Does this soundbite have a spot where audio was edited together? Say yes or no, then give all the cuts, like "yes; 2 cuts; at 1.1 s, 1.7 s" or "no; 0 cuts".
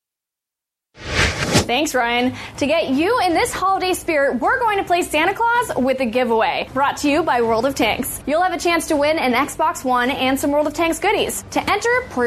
yes; 1 cut; at 1.6 s